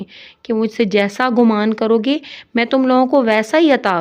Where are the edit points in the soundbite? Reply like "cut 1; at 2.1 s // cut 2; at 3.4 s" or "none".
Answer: none